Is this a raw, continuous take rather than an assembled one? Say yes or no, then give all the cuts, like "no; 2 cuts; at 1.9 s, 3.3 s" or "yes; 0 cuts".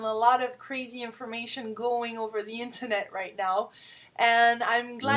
no; 1 cut; at 3.8 s